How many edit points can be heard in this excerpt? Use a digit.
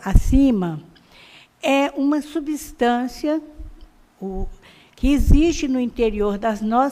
1